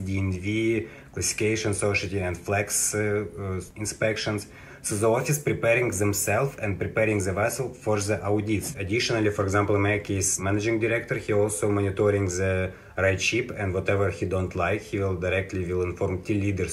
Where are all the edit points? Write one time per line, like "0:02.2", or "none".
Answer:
0:08.8
0:10.4